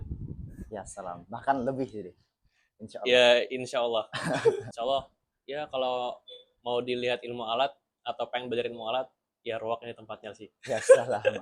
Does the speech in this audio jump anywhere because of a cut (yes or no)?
yes